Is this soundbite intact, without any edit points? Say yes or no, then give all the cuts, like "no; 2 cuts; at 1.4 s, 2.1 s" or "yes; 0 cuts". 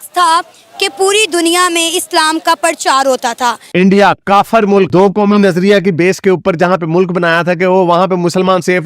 no; 1 cut; at 3.6 s